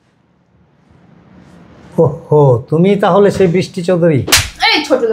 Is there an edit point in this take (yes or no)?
no